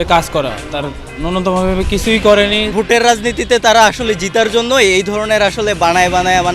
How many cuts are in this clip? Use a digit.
1